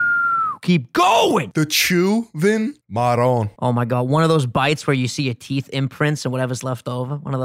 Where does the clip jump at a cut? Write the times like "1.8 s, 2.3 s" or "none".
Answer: 1.4 s, 2.8 s, 3.5 s